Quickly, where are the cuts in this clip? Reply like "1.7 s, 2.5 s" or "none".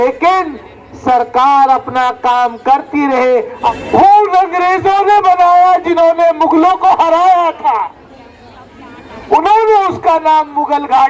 3.8 s